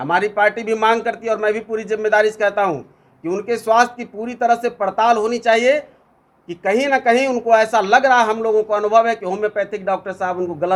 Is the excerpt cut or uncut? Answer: uncut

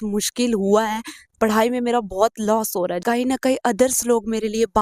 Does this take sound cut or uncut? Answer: cut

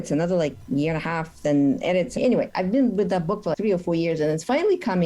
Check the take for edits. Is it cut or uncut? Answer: cut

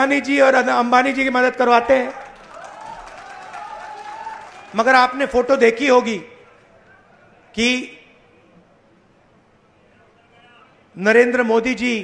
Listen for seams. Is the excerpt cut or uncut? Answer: uncut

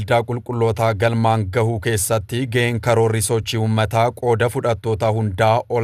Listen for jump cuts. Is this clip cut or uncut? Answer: uncut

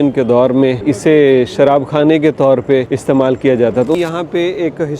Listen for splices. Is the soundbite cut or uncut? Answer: cut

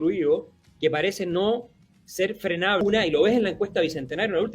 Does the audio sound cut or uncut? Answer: cut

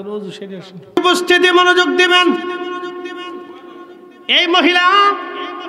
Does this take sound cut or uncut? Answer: cut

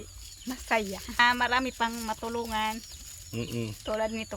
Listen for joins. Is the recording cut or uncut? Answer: cut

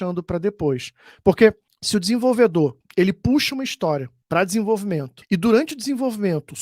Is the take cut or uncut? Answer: cut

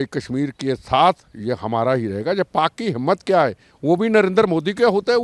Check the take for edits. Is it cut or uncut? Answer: uncut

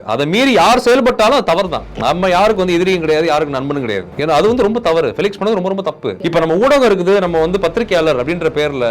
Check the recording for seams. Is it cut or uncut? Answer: cut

